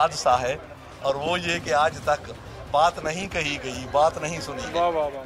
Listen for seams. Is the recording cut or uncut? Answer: uncut